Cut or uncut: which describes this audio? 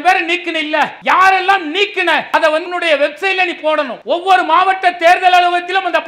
cut